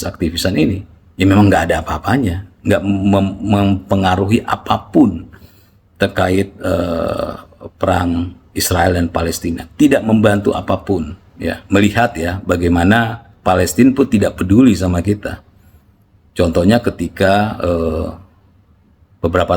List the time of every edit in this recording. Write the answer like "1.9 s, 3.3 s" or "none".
11.6 s